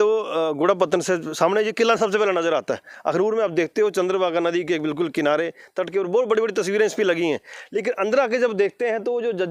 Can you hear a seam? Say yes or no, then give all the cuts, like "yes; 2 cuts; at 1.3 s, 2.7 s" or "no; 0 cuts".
no; 0 cuts